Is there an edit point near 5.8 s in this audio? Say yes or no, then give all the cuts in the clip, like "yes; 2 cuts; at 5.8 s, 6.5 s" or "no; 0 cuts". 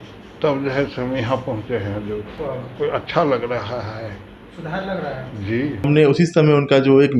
yes; 2 cuts; at 2.4 s, 5.8 s